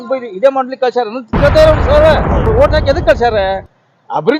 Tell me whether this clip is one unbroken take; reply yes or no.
no